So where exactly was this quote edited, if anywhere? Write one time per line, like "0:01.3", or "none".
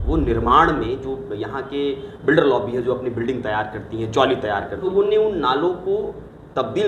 0:04.9